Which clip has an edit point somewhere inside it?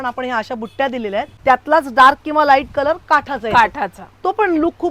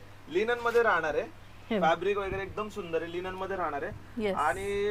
first; 1 cut; at 1.3 s

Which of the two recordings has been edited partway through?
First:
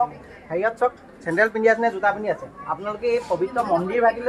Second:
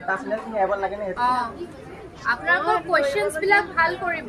second; 1 cut; at 1.1 s

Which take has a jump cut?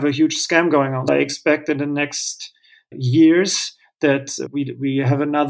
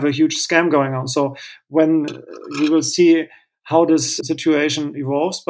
first; 2 cuts; at 1.1 s, 4.4 s

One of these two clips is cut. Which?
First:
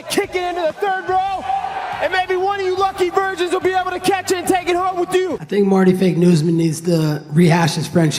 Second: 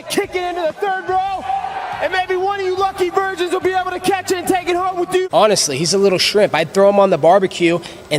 second; 1 cut; at 5.3 s

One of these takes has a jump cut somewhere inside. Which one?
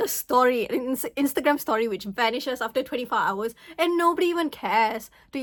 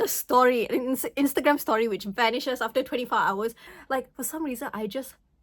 second; 1 cut; at 3.7 s

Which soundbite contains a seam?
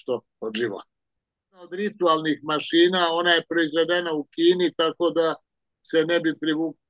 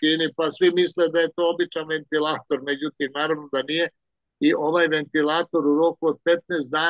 first; 1 cut; at 1.7 s

